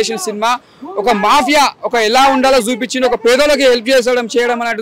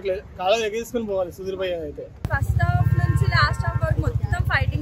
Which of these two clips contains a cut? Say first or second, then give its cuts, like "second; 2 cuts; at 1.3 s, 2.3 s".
second; 1 cut; at 2.2 s